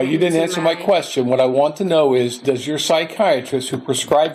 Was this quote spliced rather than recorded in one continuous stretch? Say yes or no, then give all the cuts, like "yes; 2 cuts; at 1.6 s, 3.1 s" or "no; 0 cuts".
no; 0 cuts